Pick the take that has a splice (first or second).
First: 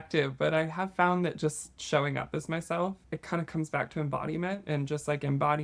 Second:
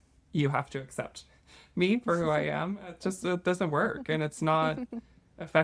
first